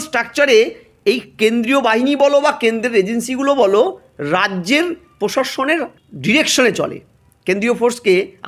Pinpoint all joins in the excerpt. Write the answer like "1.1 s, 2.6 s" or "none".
6.1 s

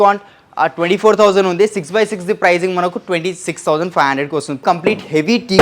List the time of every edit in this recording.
4.6 s

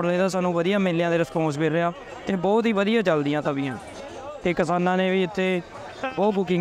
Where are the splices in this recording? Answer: none

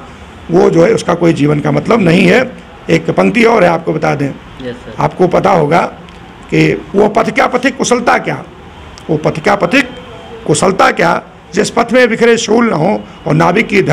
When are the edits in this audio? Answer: none

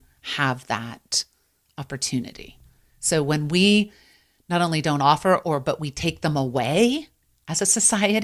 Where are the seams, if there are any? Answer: none

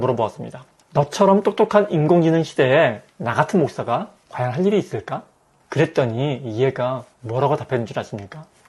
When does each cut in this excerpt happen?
none

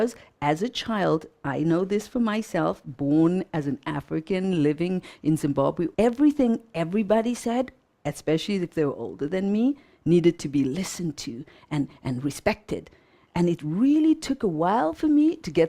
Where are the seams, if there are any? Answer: 5.9 s

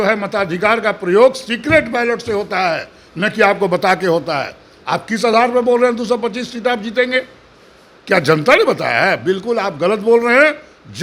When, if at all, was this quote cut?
none

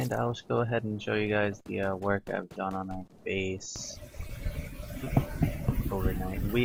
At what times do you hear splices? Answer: none

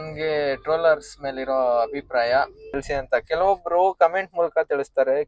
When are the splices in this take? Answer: 2.8 s

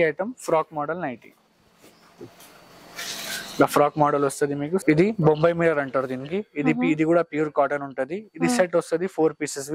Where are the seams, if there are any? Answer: 4.8 s

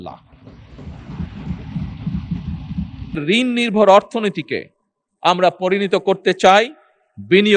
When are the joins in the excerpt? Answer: 3.2 s

